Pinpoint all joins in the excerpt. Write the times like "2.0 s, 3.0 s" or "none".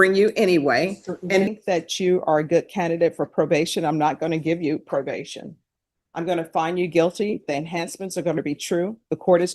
1.5 s